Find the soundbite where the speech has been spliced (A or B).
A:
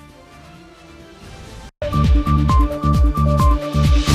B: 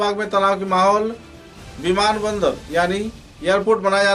A